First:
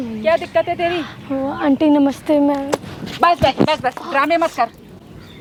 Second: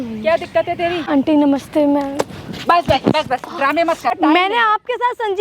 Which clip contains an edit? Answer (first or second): second